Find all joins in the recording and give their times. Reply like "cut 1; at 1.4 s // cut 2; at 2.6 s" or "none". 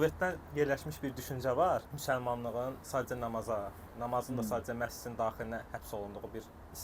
none